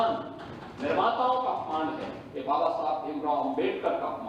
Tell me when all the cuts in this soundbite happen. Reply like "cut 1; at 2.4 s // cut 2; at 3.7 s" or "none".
none